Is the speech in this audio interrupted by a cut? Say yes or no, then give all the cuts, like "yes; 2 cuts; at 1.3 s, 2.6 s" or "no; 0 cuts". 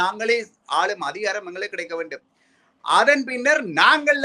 no; 0 cuts